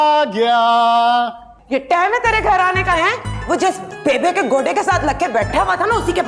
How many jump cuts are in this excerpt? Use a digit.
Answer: 1